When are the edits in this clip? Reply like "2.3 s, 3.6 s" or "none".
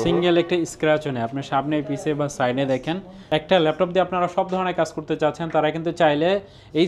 3.1 s